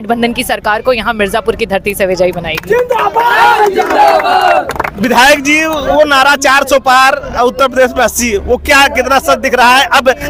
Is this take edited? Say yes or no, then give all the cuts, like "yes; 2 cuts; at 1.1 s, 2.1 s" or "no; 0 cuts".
no; 0 cuts